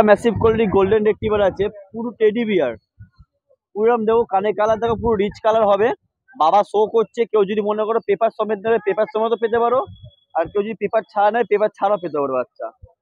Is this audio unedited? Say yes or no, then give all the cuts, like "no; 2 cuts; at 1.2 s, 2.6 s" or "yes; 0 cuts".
yes; 0 cuts